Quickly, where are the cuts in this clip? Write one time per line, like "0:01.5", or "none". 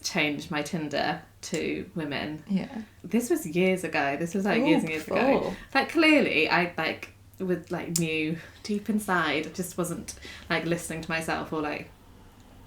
0:03.0
0:05.6